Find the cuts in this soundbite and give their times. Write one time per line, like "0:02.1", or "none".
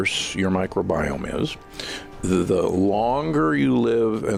none